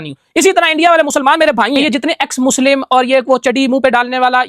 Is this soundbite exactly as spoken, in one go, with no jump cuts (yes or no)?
no